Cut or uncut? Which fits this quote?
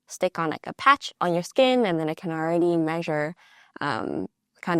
cut